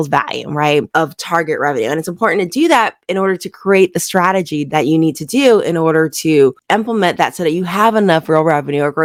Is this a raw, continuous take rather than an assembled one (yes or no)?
yes